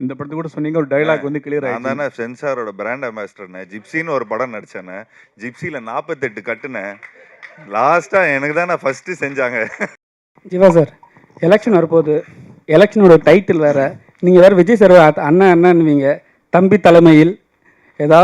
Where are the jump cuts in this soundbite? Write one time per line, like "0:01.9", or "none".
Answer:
0:09.9